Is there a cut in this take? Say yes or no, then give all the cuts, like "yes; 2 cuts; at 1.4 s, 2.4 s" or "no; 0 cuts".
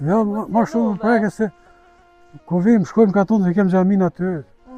no; 0 cuts